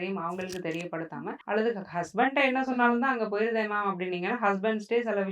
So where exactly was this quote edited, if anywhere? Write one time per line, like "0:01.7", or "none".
none